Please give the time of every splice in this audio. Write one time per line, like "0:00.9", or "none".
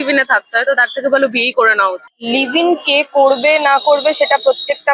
0:02.1